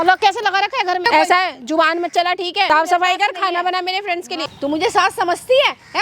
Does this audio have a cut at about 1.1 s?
yes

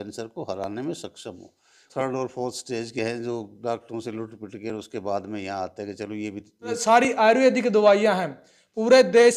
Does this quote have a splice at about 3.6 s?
no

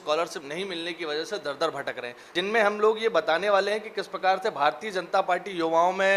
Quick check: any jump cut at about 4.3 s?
no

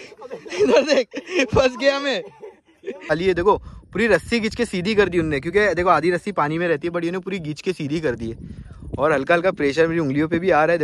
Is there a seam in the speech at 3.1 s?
yes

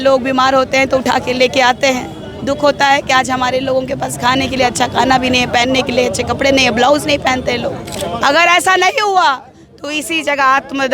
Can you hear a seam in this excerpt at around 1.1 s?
no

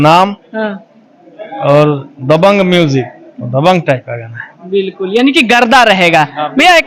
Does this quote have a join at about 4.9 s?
no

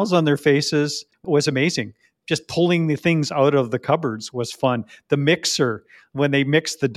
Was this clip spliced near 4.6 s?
no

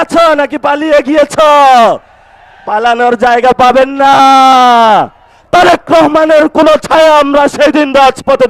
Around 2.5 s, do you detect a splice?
no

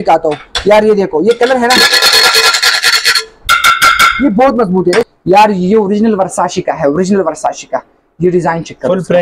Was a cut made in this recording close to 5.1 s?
yes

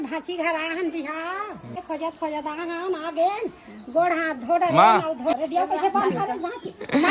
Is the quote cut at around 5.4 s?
yes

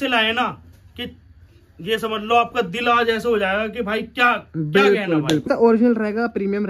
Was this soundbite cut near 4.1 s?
no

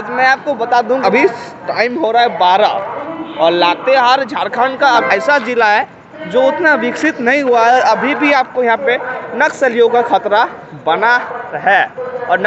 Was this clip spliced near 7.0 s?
no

